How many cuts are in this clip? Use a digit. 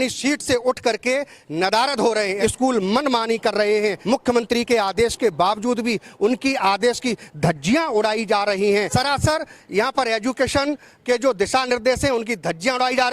3